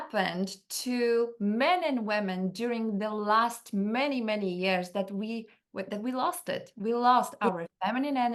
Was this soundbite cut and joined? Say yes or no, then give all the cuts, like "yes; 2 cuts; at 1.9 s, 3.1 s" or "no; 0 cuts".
no; 0 cuts